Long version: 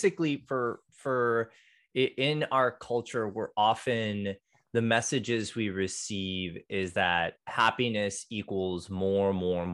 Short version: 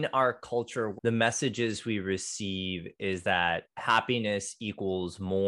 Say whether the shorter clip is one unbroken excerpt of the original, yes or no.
no